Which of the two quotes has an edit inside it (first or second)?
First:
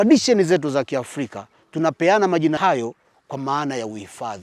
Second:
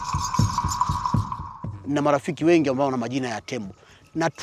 second